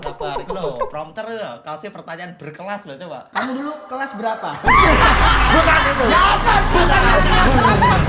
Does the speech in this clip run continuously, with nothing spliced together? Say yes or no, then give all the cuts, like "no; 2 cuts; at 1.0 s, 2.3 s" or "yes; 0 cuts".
yes; 0 cuts